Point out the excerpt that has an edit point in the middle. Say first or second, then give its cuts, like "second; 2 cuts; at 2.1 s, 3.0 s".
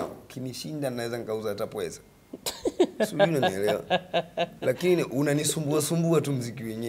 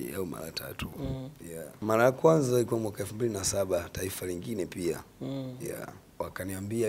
second; 2 cuts; at 1.8 s, 6.0 s